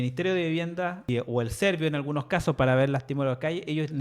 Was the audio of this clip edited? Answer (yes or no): yes